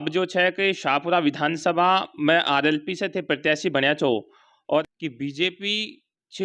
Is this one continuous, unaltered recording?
no; 1 cut; at 4.8 s

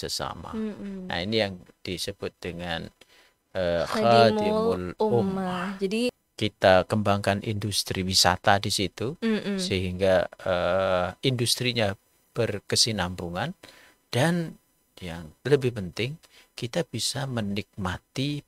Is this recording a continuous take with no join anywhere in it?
no; 1 cut; at 6.2 s

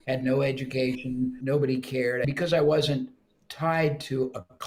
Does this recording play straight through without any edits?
no; 2 cuts; at 1.4 s, 2.3 s

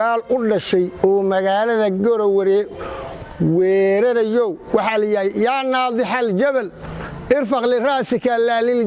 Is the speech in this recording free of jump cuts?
yes; 0 cuts

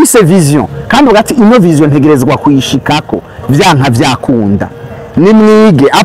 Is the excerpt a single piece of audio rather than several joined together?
yes; 0 cuts

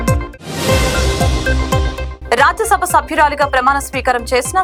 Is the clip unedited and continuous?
yes; 0 cuts

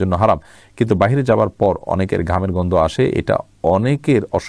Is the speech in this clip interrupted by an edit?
no; 0 cuts

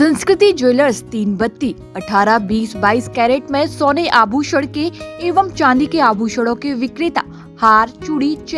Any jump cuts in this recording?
no; 0 cuts

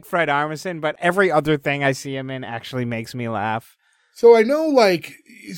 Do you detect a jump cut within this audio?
yes; 1 cut; at 1.0 s

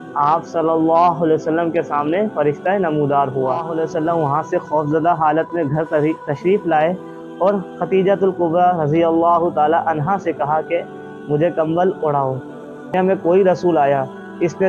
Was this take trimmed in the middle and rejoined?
yes; 2 cuts; at 3.7 s, 12.9 s

